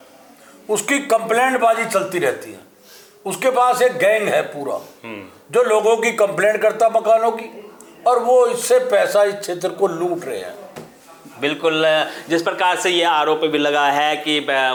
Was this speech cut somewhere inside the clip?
no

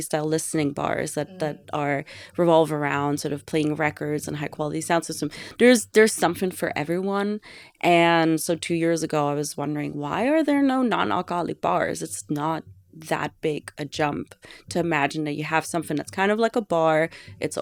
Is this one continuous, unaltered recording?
yes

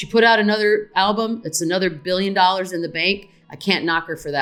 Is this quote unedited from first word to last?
yes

